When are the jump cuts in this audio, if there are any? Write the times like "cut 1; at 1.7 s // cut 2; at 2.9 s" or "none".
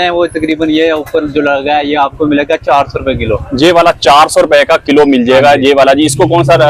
none